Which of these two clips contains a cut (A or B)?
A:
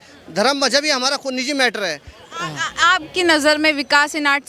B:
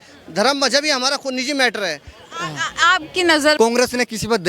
B